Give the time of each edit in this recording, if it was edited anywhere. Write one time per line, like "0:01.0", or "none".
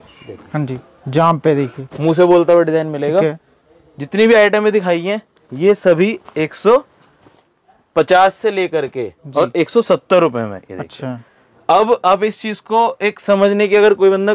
none